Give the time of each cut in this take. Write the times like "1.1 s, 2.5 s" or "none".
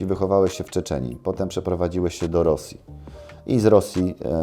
none